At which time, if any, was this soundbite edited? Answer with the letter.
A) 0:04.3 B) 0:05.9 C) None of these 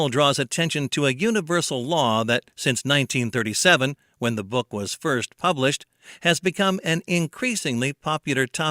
A